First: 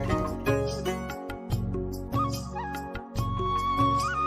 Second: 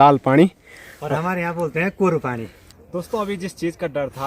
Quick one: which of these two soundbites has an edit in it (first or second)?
second